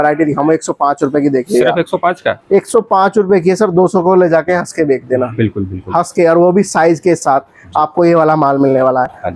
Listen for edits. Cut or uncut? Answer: uncut